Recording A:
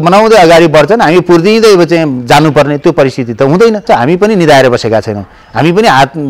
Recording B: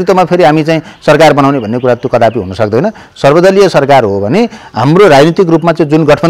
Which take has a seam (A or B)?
A